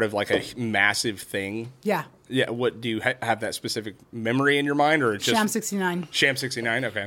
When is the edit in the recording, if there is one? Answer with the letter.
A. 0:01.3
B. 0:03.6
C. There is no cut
C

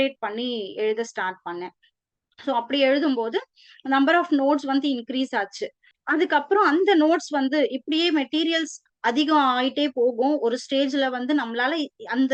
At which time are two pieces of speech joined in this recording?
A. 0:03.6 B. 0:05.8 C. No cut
C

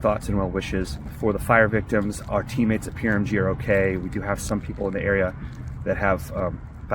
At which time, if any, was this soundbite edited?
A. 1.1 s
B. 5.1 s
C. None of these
A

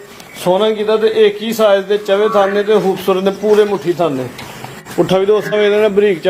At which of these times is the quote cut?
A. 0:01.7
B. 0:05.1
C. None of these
C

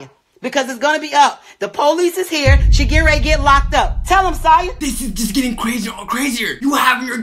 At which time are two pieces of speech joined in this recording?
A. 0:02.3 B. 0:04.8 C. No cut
B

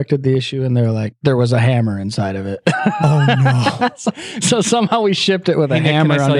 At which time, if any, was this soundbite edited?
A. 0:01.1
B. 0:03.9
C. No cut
A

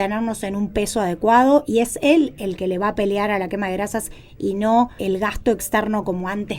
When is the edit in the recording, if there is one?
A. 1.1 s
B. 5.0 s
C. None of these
B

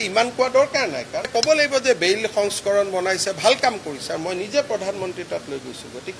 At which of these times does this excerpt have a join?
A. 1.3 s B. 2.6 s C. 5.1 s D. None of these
A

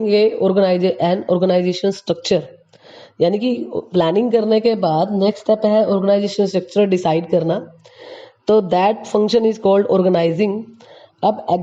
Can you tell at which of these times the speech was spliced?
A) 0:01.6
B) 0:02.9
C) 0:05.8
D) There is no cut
A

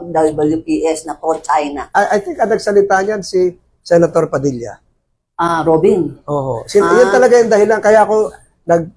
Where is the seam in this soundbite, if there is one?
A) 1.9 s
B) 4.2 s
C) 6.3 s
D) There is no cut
A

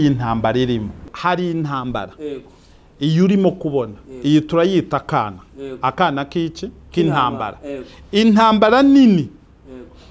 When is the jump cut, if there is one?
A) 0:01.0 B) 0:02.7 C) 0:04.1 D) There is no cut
A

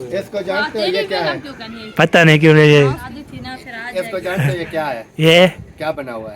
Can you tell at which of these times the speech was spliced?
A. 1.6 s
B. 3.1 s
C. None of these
B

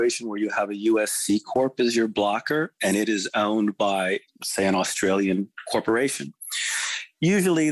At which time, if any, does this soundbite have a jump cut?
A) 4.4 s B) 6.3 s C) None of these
C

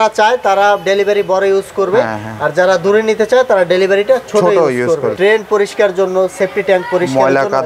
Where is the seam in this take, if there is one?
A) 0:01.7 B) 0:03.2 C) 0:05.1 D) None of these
C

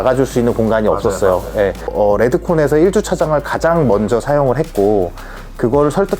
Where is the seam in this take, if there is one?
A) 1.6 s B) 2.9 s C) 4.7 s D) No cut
A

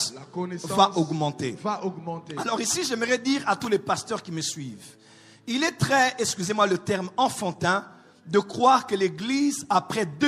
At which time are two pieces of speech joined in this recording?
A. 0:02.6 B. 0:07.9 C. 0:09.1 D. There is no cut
D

